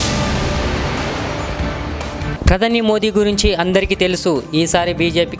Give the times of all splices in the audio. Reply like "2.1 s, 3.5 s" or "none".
2.3 s